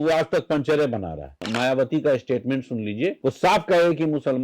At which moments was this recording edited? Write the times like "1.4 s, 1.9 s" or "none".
1.4 s, 3.2 s